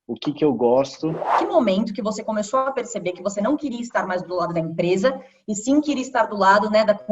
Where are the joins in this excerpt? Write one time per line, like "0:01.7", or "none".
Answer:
0:01.4

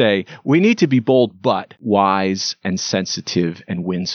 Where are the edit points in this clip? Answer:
0:01.8

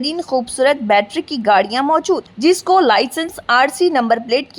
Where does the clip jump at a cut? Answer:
none

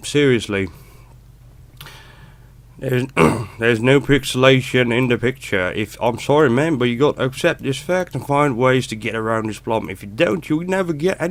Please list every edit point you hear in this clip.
none

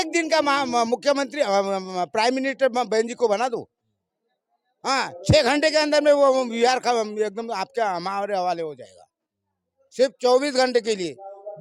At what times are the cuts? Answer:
none

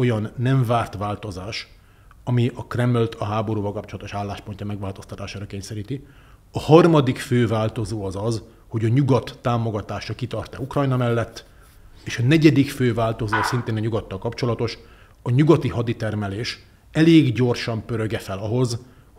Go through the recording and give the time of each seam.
none

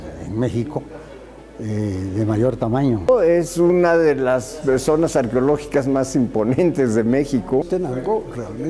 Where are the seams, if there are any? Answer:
0:03.1
0:07.7

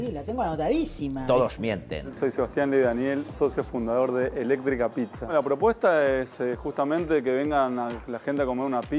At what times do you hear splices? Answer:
0:02.0

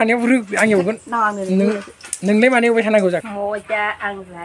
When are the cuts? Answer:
0:03.3

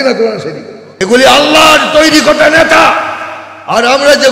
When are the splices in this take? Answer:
0:01.0

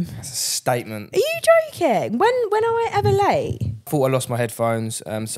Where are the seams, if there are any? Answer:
0:03.9

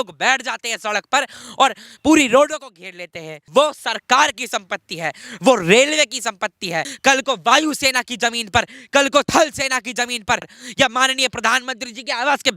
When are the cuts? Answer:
0:03.4
0:06.9
0:10.6

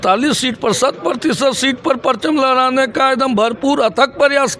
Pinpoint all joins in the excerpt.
none

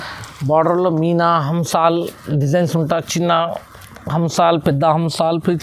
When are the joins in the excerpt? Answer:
none

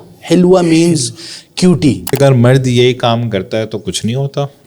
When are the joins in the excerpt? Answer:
0:02.2

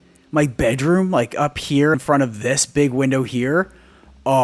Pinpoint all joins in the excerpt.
0:02.0

